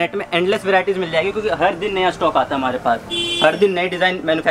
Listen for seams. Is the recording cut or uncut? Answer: uncut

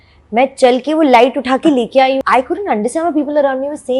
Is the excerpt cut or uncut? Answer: cut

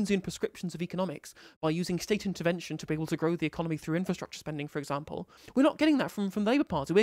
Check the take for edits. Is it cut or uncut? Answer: cut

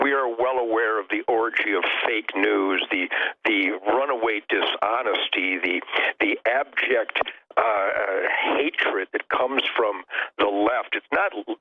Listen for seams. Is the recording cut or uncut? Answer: uncut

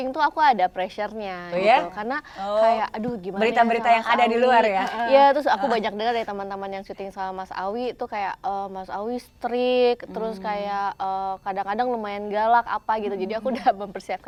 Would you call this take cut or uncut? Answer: uncut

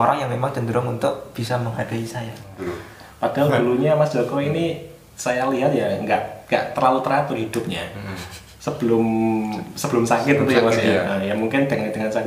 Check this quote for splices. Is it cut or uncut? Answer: cut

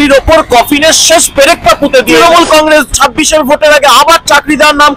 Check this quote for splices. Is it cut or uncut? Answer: cut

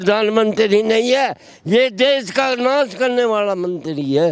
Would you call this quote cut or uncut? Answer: uncut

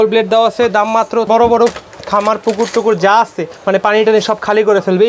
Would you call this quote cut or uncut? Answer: cut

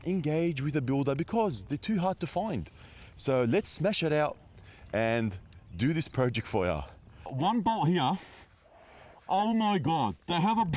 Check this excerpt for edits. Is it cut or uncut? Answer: cut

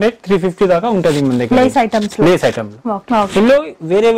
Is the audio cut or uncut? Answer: cut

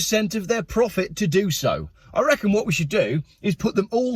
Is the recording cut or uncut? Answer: cut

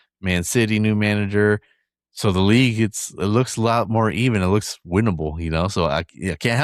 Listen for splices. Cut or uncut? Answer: uncut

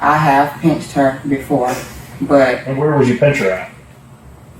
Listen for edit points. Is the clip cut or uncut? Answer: cut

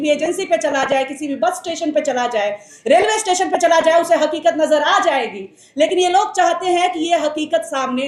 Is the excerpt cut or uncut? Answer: uncut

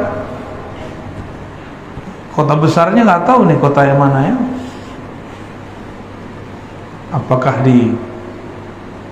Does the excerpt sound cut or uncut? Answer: uncut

